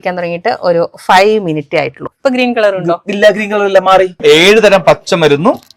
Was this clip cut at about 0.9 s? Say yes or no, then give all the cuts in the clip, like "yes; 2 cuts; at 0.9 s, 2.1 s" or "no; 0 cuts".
no; 2 cuts; at 2.1 s, 4.2 s